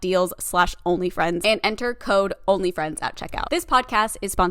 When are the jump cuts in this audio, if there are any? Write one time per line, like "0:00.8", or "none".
0:03.3